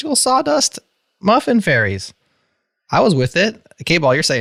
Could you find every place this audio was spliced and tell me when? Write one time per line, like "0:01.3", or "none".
none